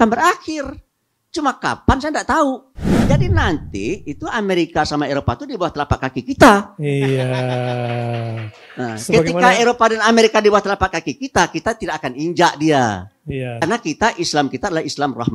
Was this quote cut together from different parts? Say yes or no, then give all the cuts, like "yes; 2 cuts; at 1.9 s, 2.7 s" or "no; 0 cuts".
yes; 2 cuts; at 3.0 s, 13.6 s